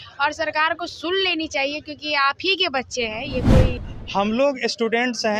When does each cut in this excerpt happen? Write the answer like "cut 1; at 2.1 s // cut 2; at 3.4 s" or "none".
cut 1; at 3.7 s